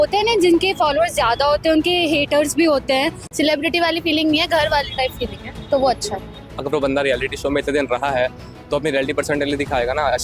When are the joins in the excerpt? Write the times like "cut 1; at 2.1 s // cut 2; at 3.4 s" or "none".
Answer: cut 1; at 3.2 s // cut 2; at 6.6 s